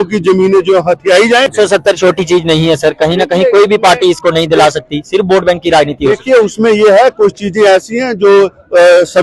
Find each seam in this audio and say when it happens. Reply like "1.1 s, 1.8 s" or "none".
1.5 s